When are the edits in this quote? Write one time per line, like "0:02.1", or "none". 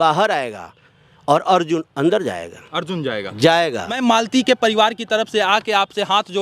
0:04.0